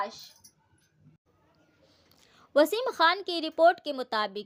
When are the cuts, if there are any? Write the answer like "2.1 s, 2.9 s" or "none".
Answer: none